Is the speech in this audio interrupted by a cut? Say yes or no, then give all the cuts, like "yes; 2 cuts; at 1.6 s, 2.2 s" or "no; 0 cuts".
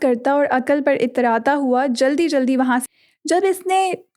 yes; 1 cut; at 2.8 s